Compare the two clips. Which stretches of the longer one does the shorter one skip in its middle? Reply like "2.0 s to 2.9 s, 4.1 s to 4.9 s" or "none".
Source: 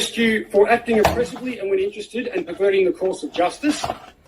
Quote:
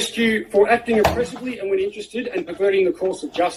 none